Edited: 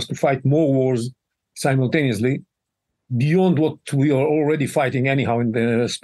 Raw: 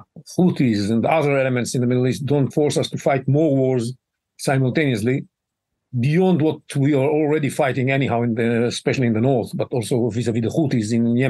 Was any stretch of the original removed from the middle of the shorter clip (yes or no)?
no